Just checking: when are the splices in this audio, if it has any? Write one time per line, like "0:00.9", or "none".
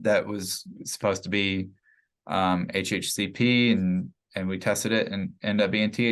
none